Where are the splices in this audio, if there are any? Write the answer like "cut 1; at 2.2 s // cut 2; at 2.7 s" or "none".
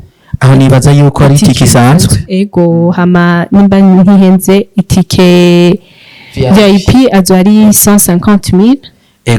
none